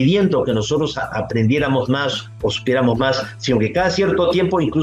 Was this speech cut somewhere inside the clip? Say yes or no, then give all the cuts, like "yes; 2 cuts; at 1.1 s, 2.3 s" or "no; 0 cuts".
no; 0 cuts